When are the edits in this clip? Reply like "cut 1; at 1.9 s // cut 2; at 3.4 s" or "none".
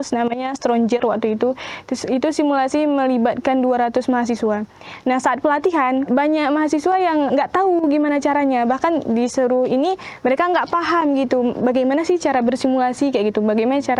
cut 1; at 6.1 s // cut 2; at 7.3 s